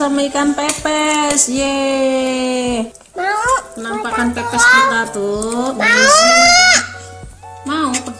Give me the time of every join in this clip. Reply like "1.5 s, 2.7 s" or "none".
3.0 s